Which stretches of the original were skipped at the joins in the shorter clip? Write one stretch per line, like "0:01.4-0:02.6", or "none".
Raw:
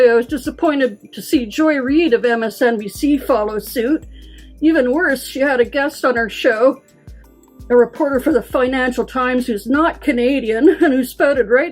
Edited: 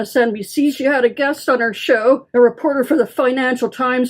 0:03.2-0:05.3
0:06.8-0:07.6